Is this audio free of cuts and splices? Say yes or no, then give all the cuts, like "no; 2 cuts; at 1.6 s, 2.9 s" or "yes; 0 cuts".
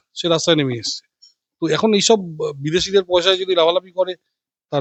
yes; 0 cuts